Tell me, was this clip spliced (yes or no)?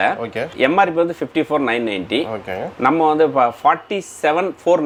no